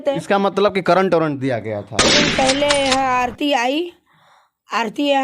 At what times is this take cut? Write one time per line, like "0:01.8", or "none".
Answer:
0:02.1